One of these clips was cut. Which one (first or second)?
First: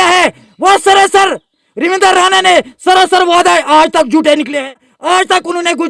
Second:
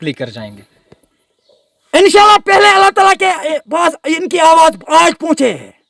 first